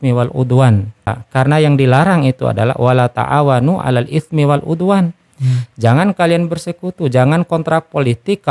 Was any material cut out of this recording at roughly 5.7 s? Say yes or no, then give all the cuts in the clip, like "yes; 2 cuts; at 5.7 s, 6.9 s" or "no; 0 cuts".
no; 1 cut; at 1.2 s